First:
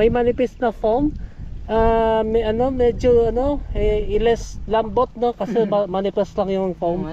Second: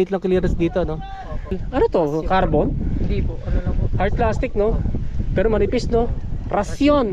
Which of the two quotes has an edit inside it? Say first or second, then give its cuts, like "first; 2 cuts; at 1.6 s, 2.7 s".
second; 1 cut; at 1.6 s